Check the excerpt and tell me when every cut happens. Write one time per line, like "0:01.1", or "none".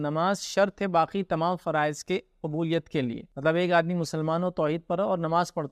0:03.3